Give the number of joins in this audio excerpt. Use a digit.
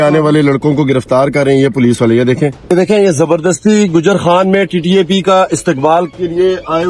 1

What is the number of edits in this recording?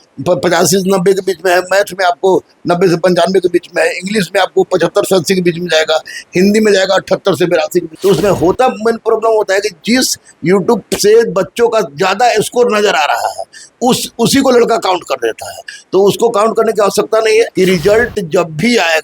2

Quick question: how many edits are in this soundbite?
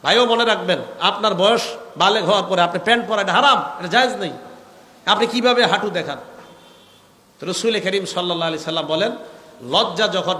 0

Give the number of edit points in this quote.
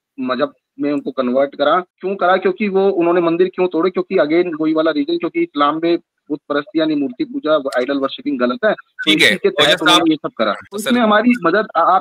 2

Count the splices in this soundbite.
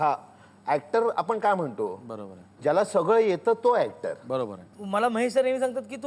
1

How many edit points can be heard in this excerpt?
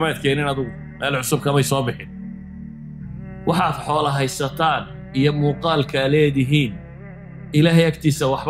2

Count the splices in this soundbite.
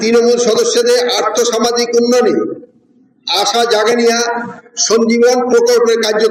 0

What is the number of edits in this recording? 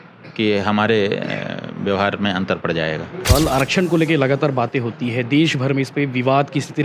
1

